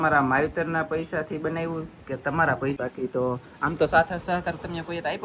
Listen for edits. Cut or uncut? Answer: cut